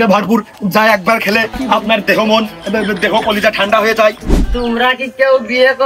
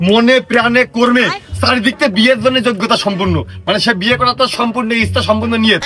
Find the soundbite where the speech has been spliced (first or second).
first